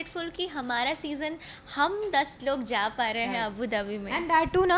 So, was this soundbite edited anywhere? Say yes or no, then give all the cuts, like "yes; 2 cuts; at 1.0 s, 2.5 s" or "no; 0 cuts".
no; 0 cuts